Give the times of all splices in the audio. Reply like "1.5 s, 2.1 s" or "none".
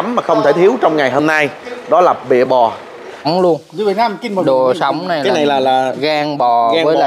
3.3 s